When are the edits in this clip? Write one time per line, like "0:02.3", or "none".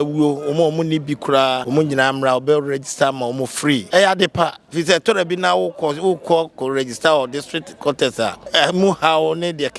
0:01.6
0:03.8
0:08.4